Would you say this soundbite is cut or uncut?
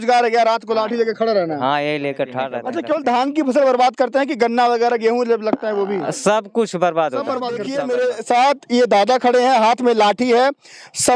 cut